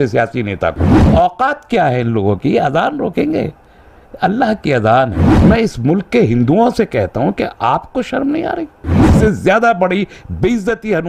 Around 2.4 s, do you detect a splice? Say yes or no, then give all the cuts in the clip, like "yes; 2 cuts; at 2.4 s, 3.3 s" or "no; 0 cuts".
no; 3 cuts; at 0.9 s, 5.2 s, 9.1 s